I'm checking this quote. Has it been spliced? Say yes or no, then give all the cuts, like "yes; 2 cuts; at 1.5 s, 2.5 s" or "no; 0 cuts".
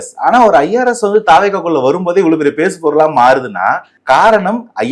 yes; 1 cut; at 3.9 s